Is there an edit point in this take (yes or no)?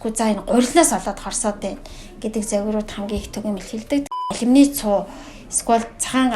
yes